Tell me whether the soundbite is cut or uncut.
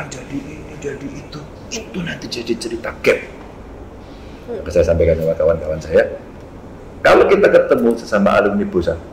uncut